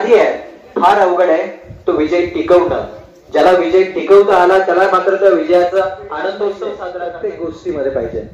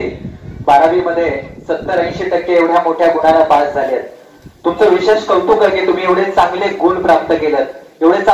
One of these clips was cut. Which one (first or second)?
first